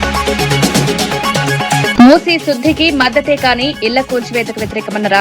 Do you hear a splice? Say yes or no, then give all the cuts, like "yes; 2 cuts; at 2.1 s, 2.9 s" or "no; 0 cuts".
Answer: yes; 1 cut; at 1.9 s